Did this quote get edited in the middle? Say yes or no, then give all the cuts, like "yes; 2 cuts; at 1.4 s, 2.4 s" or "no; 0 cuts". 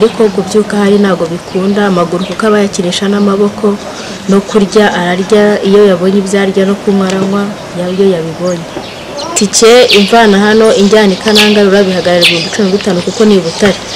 yes; 1 cut; at 9.3 s